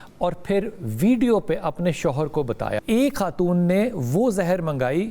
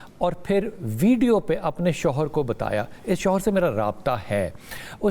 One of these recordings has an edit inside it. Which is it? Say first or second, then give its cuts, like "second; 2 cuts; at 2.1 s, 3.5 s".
first; 1 cut; at 2.8 s